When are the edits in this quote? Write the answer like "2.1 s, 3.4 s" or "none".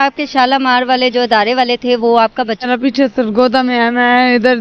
2.6 s